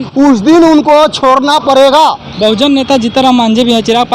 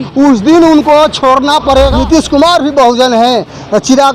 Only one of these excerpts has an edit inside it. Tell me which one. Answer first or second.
second